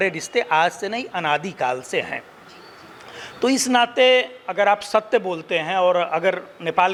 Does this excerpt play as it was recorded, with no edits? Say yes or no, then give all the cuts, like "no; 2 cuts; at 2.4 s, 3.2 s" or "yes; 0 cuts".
yes; 0 cuts